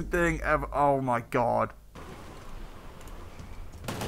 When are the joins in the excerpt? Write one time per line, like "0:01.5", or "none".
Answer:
0:02.0